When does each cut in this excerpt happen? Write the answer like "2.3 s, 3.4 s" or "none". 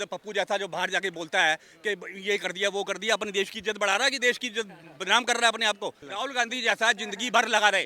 6.1 s